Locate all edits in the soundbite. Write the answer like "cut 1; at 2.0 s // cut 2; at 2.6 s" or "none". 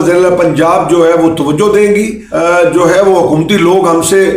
cut 1; at 2.2 s

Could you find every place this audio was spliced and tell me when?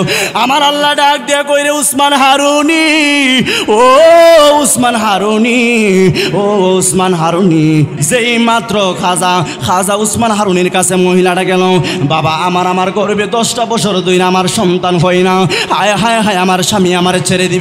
cut 1; at 8.0 s

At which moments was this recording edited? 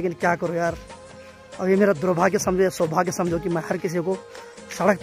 none

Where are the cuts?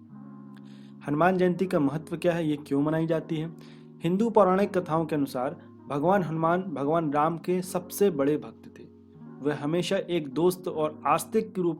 cut 1; at 0.9 s

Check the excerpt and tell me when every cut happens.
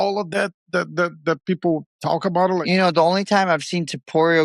cut 1; at 2.6 s

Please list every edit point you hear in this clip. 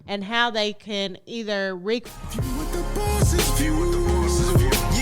cut 1; at 2.1 s

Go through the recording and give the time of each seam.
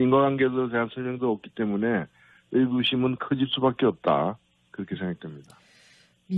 none

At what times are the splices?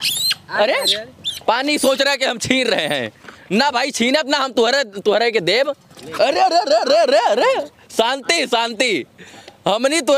none

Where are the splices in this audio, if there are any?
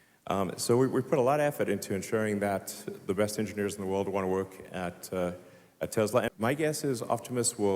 cut 1; at 6.3 s

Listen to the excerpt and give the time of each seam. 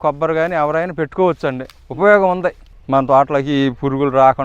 cut 1; at 2.7 s

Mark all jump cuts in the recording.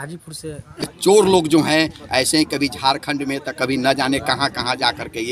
cut 1; at 0.9 s

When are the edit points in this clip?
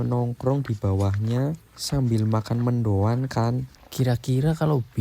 cut 1; at 3.7 s

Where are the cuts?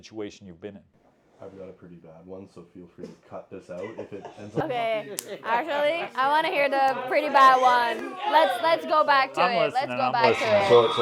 none

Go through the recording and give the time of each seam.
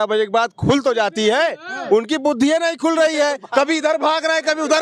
none

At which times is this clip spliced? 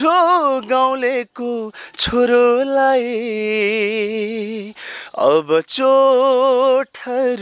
none

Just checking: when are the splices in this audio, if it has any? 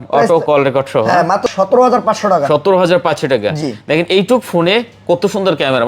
cut 1; at 1.5 s

